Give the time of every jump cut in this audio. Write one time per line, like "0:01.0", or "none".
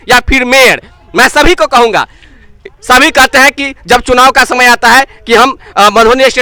none